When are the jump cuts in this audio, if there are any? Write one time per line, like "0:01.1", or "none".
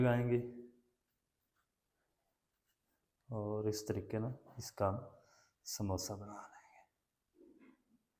none